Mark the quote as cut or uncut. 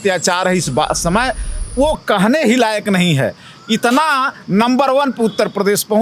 uncut